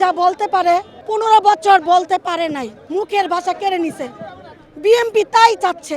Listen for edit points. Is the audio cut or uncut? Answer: cut